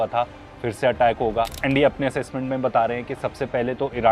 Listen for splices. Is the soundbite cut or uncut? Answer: cut